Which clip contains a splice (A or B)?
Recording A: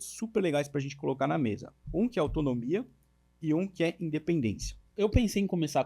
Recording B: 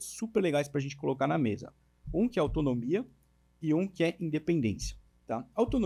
A